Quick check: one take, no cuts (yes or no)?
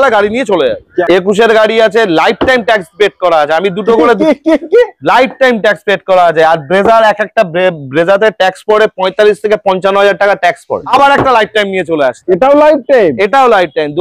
no